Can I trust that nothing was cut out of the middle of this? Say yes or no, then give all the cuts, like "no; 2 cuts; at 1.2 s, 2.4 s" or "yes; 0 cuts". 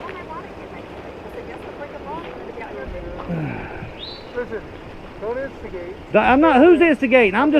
yes; 0 cuts